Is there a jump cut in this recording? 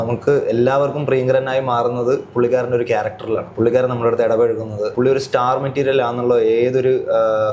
yes; 2 cuts; at 3.5 s, 4.9 s

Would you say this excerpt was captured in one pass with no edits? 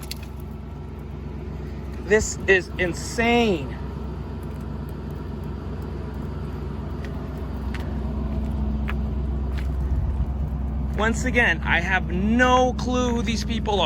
yes; 0 cuts

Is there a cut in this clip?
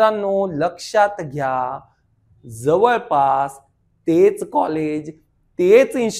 no; 0 cuts

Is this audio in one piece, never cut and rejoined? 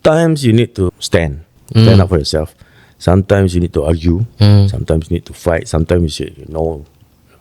no; 1 cut; at 0.9 s

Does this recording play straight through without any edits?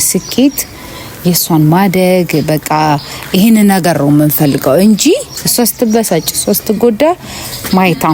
yes; 0 cuts

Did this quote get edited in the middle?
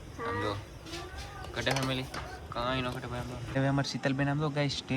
yes; 1 cut; at 3.5 s

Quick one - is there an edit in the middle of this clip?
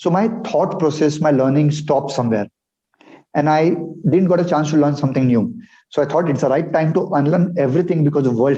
no; 0 cuts

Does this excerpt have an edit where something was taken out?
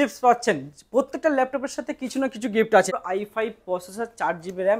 yes; 1 cut; at 2.9 s

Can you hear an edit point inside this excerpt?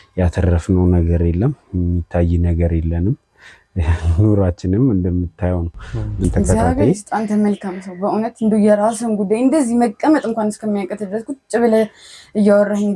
yes; 1 cut; at 6.2 s

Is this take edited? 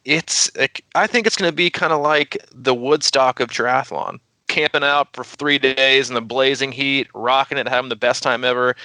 yes; 1 cut; at 4.4 s

